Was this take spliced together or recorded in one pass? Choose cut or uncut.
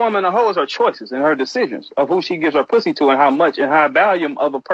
cut